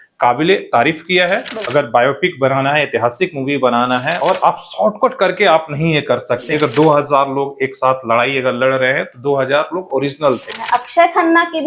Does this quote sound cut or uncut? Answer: cut